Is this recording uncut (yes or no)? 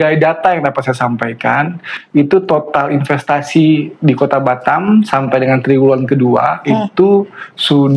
yes